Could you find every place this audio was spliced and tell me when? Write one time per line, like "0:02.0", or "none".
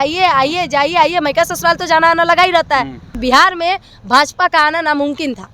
0:03.1